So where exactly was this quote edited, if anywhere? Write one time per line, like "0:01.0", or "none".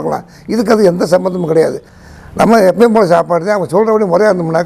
0:01.9